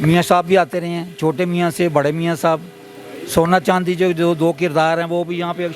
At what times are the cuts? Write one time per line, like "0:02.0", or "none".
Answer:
none

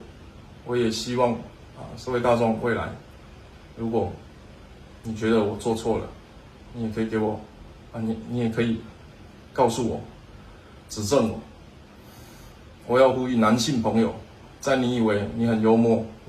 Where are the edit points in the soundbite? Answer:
none

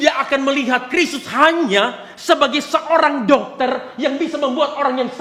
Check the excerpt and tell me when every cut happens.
none

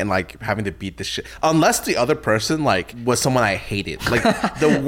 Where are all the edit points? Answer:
0:02.9

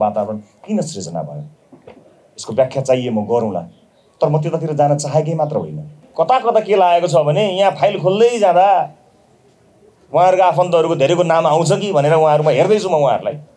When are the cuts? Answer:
0:06.0

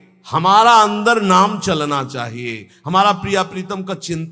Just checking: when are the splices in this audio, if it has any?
none

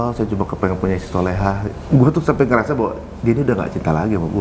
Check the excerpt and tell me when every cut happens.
0:01.8

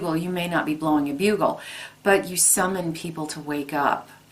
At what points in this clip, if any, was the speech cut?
none

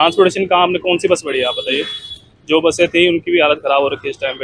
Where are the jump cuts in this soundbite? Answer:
none

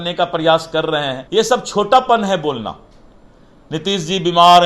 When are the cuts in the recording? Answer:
0:01.2

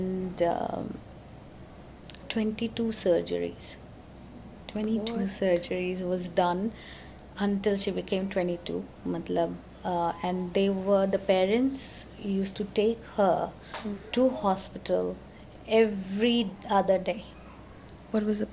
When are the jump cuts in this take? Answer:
none

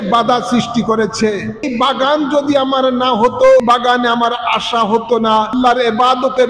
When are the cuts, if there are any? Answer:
0:01.7
0:03.6
0:05.5

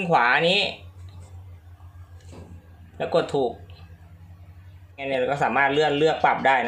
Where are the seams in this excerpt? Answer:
0:05.0

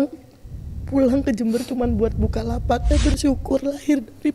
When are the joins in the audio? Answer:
0:02.8

